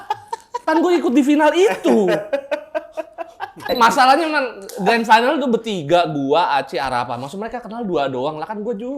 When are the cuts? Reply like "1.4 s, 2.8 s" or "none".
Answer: 3.6 s